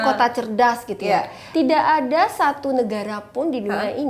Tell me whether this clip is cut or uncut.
cut